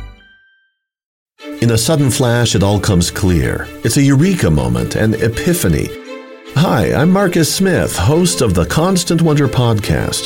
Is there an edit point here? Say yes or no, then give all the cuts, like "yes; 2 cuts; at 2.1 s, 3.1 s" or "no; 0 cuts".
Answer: yes; 1 cut; at 1.2 s